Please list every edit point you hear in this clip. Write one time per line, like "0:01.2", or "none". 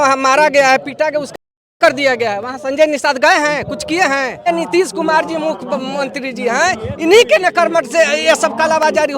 0:04.5